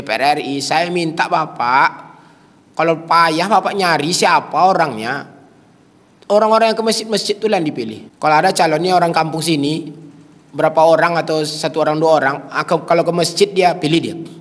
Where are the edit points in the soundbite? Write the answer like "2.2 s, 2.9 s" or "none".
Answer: 8.0 s